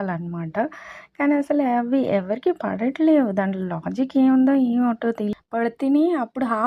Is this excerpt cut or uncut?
cut